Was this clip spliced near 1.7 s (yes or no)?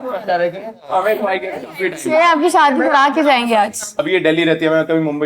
no